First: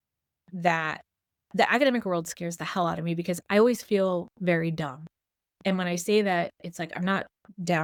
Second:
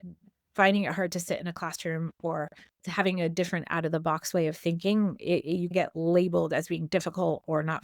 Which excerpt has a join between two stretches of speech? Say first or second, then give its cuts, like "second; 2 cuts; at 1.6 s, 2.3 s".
second; 2 cuts; at 2.7 s, 5.7 s